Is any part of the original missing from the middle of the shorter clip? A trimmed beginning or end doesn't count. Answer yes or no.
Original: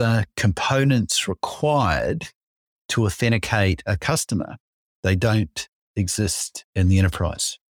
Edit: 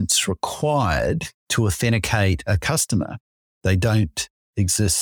yes